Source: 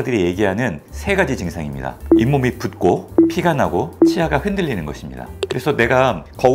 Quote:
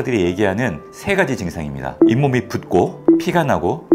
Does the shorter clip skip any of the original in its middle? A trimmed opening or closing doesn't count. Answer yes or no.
yes